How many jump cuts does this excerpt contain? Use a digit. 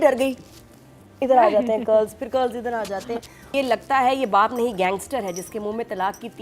1